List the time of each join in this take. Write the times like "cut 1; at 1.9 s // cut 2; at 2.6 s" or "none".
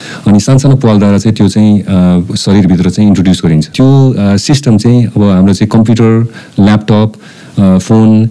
cut 1; at 3.7 s

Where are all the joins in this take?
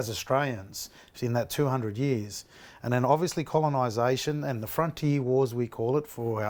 none

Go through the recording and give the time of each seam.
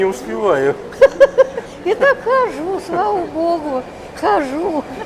none

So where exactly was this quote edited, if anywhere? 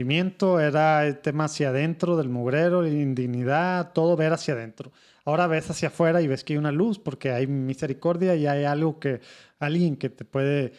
none

